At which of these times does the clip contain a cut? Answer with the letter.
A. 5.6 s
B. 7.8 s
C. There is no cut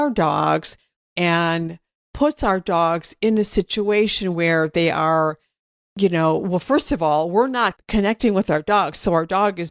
B